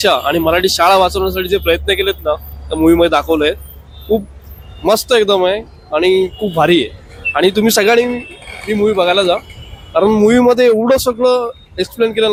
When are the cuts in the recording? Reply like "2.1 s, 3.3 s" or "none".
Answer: none